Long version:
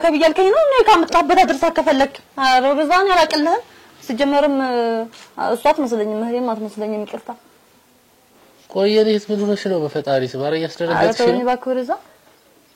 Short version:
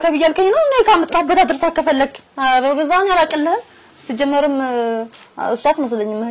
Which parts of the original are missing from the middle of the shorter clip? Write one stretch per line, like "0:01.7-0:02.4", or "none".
none